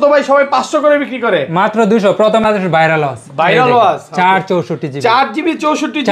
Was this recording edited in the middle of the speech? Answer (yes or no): yes